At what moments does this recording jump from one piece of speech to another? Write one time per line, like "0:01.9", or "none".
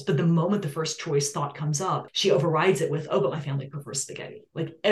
0:02.1